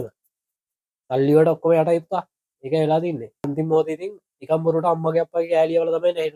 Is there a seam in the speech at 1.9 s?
no; 1 cut; at 3.5 s

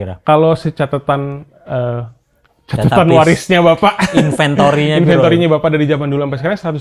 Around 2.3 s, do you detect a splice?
no; 0 cuts

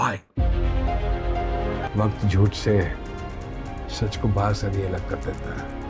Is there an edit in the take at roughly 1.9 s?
yes; 1 cut; at 1.9 s

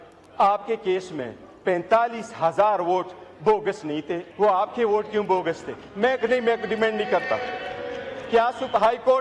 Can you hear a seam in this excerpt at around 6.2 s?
no; 1 cut; at 4.2 s

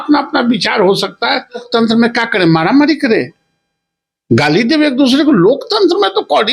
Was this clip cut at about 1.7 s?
yes; 1 cut; at 1.7 s

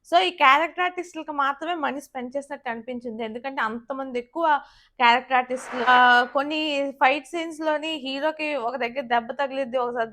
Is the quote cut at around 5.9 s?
yes; 1 cut; at 5.9 s

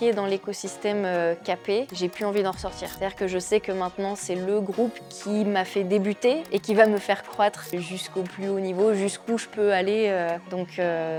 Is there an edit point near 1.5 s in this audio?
no; 0 cuts

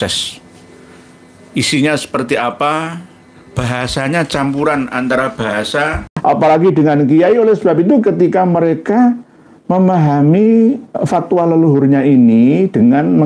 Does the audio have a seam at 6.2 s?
yes; 1 cut; at 6.2 s

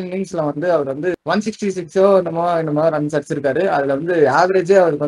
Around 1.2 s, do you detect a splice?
yes; 1 cut; at 1.2 s

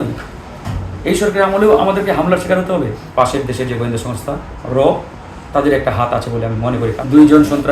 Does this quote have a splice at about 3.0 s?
yes; 2 cuts; at 3.0 s, 6.9 s

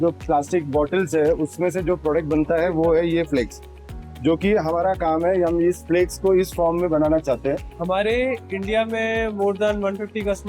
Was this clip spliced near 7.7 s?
yes; 1 cut; at 7.7 s

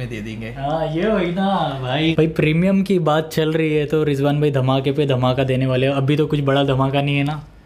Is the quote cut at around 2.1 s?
yes; 1 cut; at 2.1 s

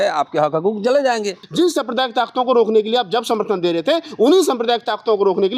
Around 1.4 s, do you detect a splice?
yes; 1 cut; at 1.4 s

